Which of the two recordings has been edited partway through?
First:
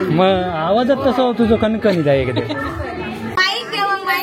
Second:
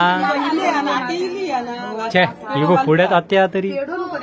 first; 1 cut; at 3.3 s

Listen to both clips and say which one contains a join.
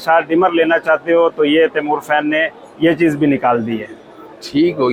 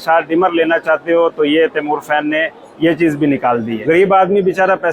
second; 1 cut; at 3.8 s

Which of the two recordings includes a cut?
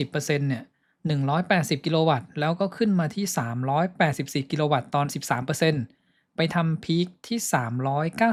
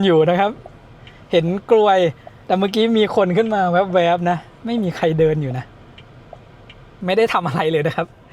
second; 1 cut; at 6.9 s

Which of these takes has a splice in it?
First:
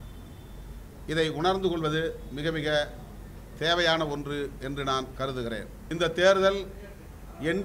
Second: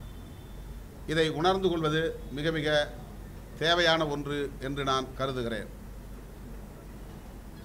first; 1 cut; at 5.8 s

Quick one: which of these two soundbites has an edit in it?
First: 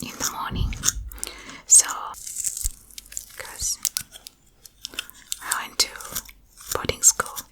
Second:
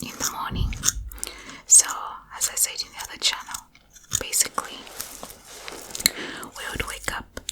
first; 1 cut; at 2.1 s

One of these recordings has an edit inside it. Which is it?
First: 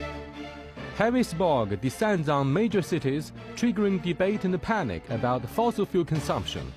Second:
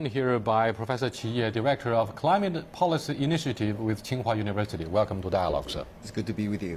first; 1 cut; at 3.8 s

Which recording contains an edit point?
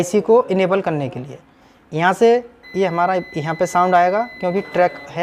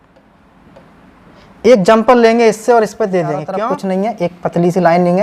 second; 1 cut; at 3.5 s

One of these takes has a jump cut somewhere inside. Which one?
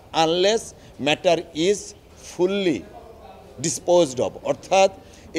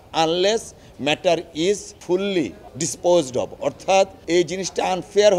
second; 3 cuts; at 1.9 s, 2.6 s, 4.2 s

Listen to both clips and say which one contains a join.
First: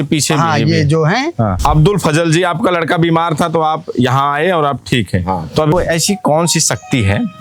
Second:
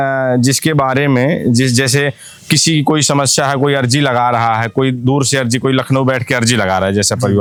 first; 2 cuts; at 1.5 s, 5.7 s

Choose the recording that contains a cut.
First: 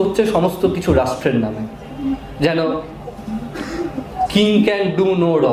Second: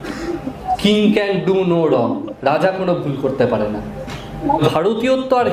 second; 1 cut; at 4.6 s

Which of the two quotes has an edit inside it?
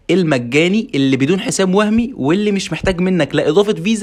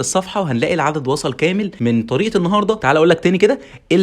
second; 2 cuts; at 1.7 s, 2.8 s

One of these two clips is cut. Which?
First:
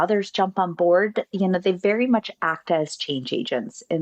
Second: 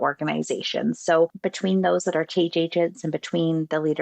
second; 1 cut; at 1.4 s

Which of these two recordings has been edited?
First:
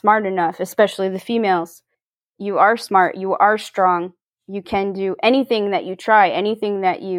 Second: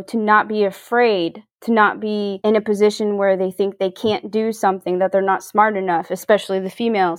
second; 1 cut; at 2.3 s

